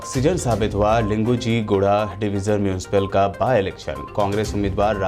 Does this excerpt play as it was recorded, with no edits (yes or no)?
yes